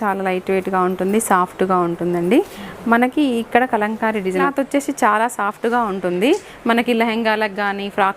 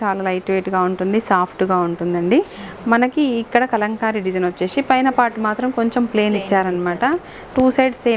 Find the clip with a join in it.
first; 1 cut; at 4.5 s

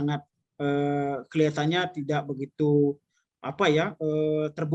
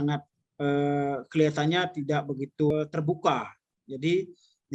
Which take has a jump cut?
second; 1 cut; at 2.7 s

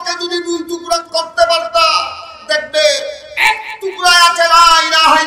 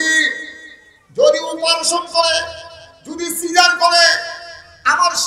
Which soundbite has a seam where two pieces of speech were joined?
first; 2 cuts; at 1.0 s, 2.4 s

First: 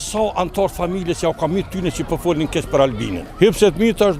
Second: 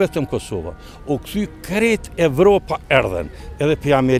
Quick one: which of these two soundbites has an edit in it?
first; 1 cut; at 3.2 s

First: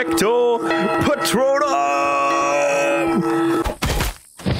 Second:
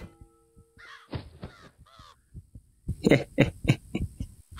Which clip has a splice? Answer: first; 1 cut; at 3.6 s

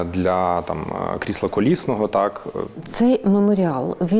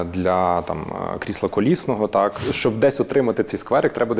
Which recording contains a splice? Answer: second; 1 cut; at 2.4 s

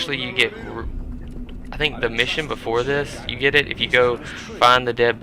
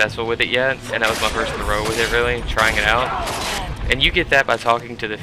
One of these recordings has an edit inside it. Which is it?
first; 1 cut; at 1.7 s

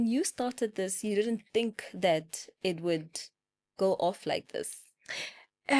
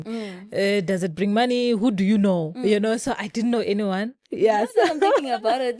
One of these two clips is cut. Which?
second; 1 cut; at 4.2 s

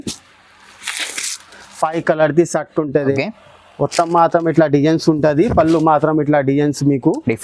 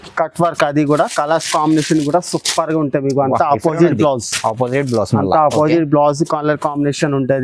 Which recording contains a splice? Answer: first; 1 cut; at 3.1 s

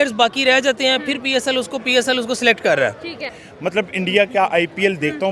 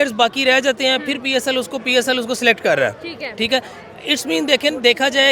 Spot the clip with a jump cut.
first; 1 cut; at 3.3 s

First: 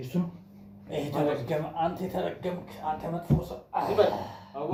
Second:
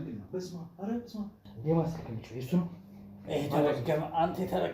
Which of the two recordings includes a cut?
second; 1 cut; at 1.4 s

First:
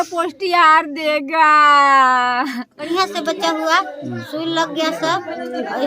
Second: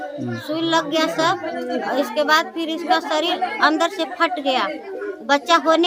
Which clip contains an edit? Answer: first; 1 cut; at 2.9 s

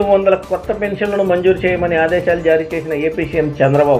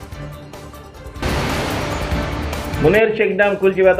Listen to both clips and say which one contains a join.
second; 2 cuts; at 1.2 s, 2.7 s

